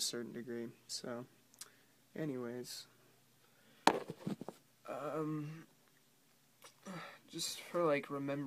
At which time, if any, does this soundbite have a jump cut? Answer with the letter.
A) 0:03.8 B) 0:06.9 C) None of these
C